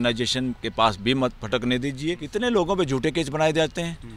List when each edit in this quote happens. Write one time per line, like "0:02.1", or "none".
0:02.2